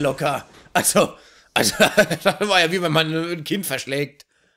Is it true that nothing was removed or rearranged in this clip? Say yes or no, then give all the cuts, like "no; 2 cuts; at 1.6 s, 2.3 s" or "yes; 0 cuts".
yes; 0 cuts